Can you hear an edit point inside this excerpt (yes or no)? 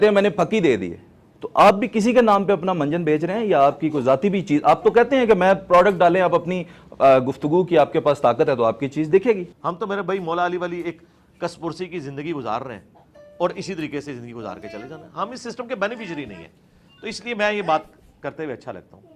yes